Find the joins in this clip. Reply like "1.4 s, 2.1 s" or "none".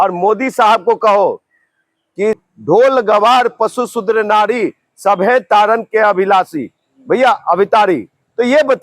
2.4 s